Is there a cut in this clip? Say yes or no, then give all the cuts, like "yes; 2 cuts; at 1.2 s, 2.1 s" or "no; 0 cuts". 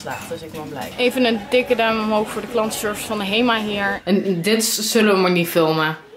yes; 2 cuts; at 0.9 s, 4.0 s